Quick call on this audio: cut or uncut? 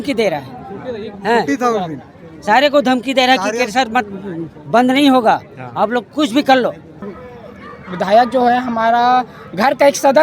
cut